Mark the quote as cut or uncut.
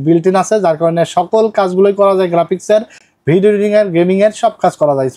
uncut